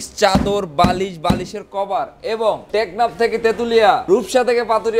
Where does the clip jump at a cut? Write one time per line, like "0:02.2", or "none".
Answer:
0:02.6
0:04.0